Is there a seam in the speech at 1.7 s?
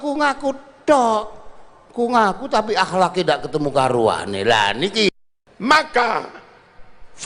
no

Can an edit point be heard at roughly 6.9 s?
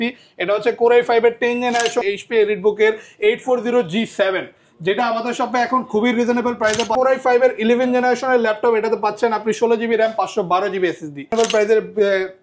yes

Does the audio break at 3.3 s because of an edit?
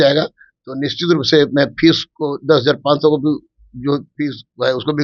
no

